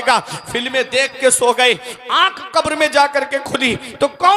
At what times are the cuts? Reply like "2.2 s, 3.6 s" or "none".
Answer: none